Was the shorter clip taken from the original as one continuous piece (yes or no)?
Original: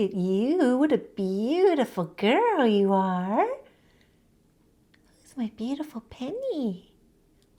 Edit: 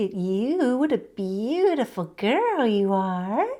yes